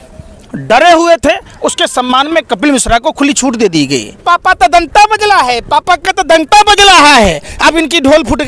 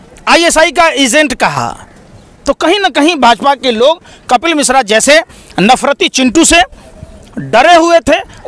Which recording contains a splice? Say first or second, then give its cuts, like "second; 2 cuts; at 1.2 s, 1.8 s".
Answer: first; 1 cut; at 4.1 s